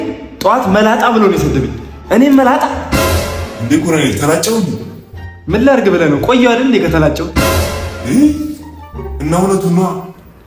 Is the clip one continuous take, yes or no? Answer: yes